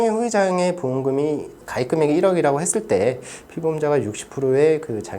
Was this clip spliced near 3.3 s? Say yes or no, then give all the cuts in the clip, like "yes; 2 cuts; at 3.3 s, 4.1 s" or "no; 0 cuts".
no; 1 cut; at 1.6 s